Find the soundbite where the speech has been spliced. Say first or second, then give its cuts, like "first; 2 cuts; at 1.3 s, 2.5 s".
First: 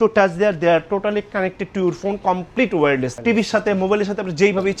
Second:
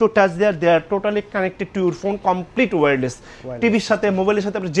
first; 1 cut; at 3.1 s